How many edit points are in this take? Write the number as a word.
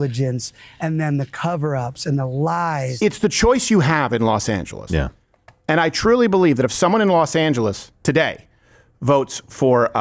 one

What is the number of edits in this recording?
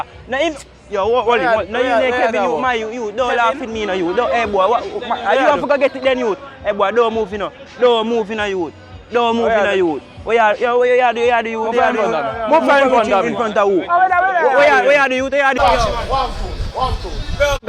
one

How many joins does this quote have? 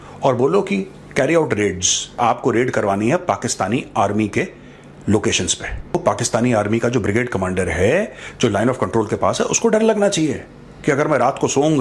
two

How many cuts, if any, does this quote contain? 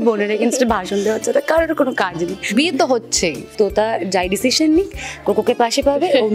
two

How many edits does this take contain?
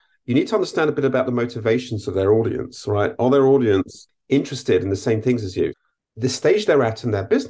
one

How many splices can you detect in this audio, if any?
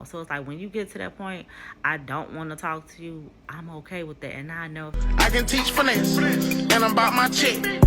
one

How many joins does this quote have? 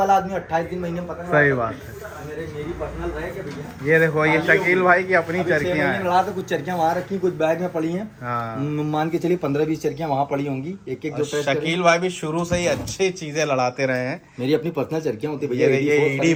zero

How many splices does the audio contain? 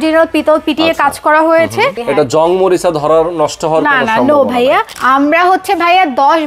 two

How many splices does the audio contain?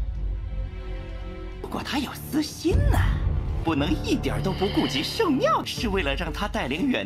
one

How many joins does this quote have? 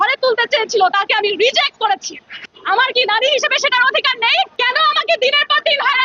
zero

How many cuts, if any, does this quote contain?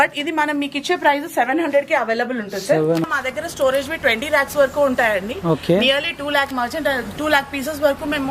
one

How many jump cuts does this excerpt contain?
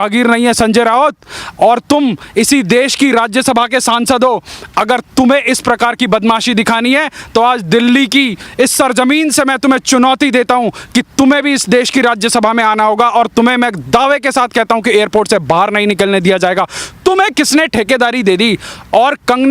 zero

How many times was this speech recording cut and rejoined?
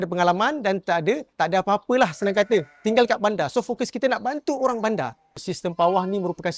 two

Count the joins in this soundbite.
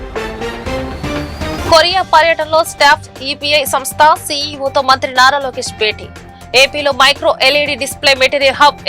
one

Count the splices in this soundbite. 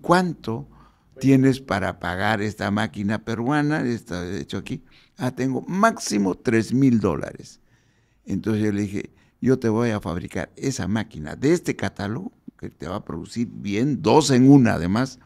zero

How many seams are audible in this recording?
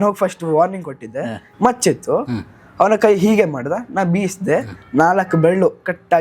one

